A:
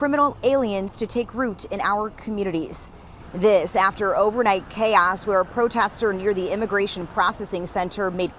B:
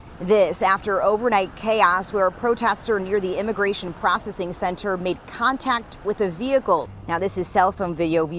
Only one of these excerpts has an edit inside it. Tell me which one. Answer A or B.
B